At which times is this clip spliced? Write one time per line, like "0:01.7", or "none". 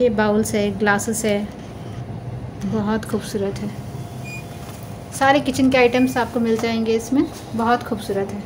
none